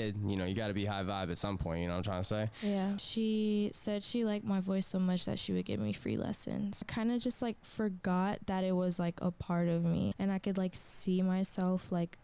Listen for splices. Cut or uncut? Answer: cut